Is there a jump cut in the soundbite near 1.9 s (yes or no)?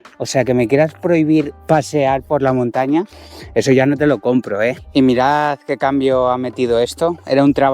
no